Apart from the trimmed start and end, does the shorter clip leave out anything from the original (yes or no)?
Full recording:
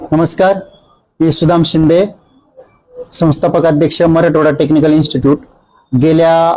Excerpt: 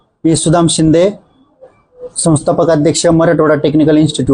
no